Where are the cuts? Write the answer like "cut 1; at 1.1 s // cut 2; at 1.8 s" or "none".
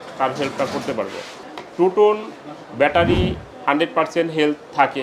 cut 1; at 1.4 s